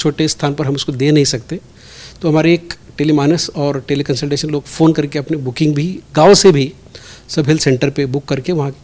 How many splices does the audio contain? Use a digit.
0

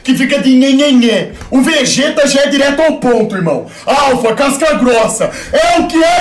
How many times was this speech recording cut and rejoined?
0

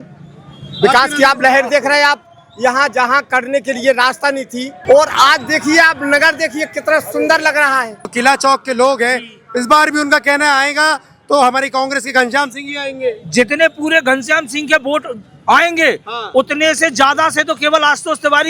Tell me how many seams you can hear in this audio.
1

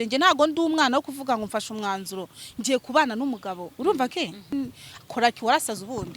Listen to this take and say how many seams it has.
1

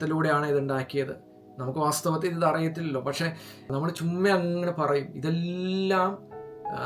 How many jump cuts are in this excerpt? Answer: 0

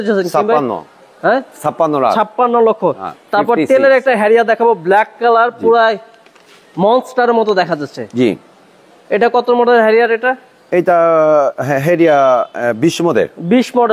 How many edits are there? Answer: 0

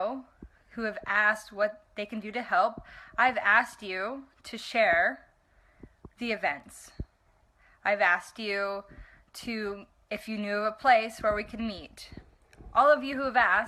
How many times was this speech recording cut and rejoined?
0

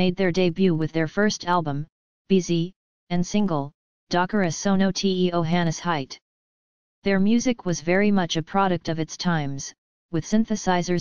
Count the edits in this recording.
1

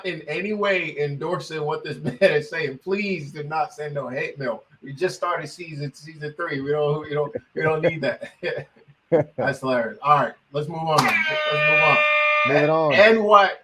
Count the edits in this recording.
0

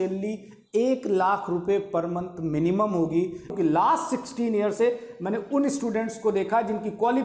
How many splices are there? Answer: 1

